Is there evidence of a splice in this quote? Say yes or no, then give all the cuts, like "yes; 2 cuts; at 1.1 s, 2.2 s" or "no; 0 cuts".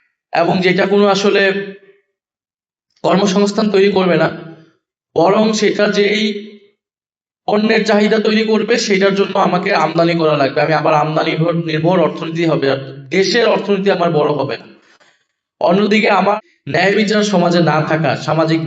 yes; 1 cut; at 16.4 s